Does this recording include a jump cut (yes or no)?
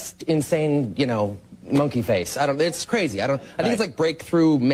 no